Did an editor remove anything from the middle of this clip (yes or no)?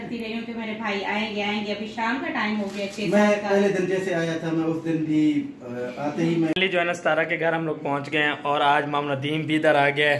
yes